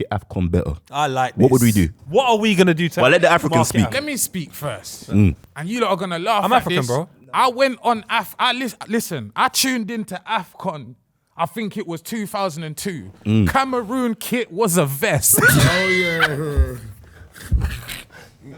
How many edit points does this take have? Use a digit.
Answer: 0